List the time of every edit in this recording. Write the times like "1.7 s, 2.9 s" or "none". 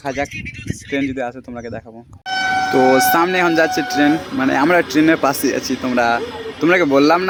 none

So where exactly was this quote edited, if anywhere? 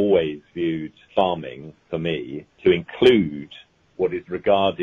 1.0 s, 2.4 s

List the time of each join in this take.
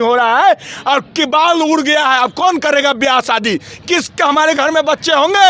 none

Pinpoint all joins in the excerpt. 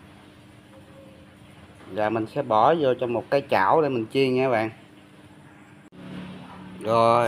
none

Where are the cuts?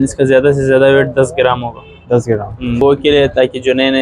2.8 s

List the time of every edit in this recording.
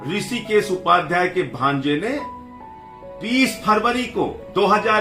none

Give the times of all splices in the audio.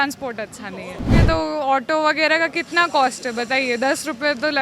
1.2 s

